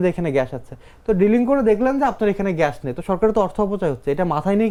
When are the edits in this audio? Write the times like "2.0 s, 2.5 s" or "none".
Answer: none